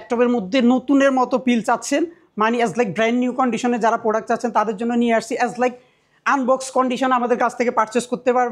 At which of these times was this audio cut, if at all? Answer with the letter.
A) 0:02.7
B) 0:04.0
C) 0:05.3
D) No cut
D